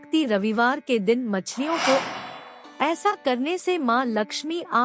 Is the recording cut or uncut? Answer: cut